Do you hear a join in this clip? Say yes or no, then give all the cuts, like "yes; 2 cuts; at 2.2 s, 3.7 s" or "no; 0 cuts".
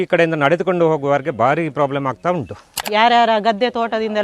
yes; 1 cut; at 2.8 s